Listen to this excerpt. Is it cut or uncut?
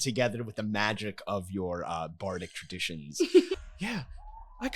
cut